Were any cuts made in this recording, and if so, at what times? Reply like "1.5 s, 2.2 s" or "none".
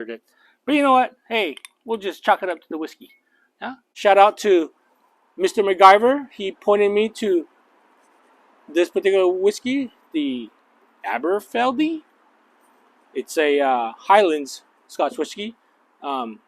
3.8 s